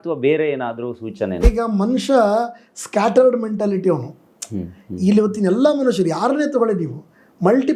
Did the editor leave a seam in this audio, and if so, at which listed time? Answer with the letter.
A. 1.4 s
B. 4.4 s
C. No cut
A